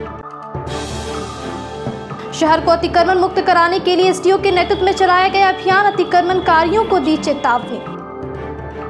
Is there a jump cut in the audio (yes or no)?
yes